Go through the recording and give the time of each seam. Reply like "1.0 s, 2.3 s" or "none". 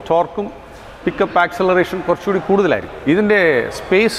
2.8 s